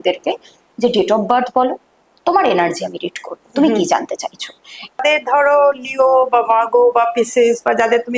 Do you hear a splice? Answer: yes; 1 cut; at 5.0 s

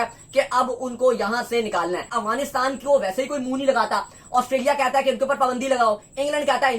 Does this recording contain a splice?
yes; 1 cut; at 2.1 s

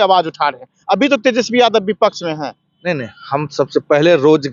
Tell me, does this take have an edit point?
no; 0 cuts

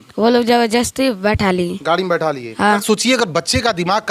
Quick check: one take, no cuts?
no; 1 cut; at 2.8 s

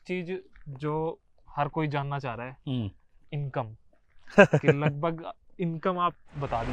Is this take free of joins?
yes; 0 cuts

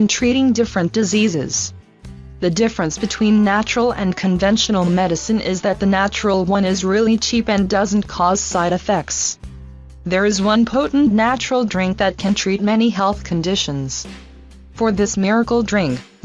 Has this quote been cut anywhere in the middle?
yes; 1 cut; at 4.6 s

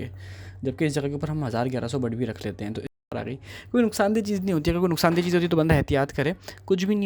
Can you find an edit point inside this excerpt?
yes; 1 cut; at 3.1 s

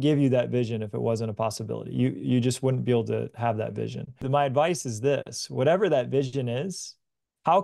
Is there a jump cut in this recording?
yes; 1 cut; at 4.2 s

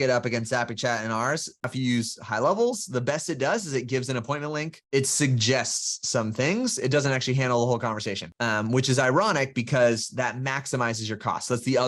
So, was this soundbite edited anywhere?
yes; 1 cut; at 1.7 s

